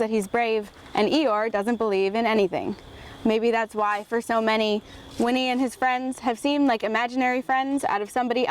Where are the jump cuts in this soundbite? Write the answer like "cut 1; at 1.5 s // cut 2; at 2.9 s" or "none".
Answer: none